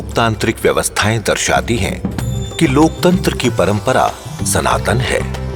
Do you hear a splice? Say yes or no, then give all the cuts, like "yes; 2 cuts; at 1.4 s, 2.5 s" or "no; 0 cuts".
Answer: no; 0 cuts